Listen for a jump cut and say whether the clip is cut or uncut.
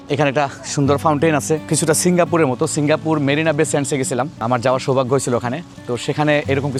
uncut